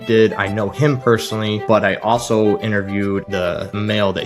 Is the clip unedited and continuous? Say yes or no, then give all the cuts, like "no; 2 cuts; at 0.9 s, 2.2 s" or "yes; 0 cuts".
no; 2 cuts; at 1.6 s, 3.2 s